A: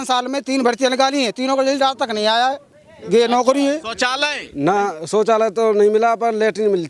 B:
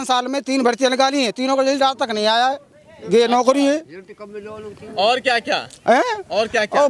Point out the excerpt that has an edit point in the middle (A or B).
A